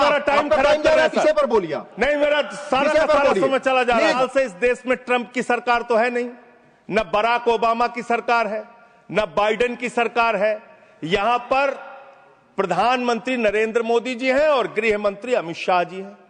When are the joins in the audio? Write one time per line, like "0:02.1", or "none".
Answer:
0:04.2